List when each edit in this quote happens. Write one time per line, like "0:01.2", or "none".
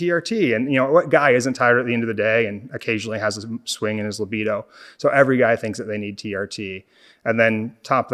none